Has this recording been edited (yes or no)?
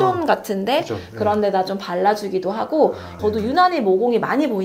yes